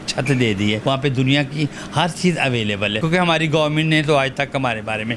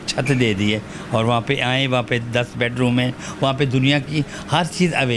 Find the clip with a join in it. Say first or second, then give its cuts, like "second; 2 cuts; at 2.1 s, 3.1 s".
first; 2 cuts; at 0.8 s, 3.0 s